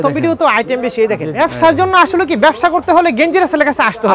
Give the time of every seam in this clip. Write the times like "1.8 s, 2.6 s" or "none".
1.3 s